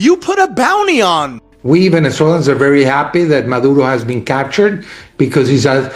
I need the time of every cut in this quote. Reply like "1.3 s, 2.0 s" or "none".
1.4 s